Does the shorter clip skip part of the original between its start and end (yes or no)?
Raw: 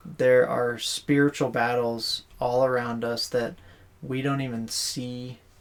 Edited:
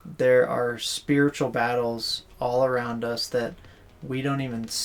no